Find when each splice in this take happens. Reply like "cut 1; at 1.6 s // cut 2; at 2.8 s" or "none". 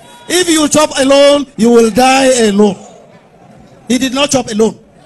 none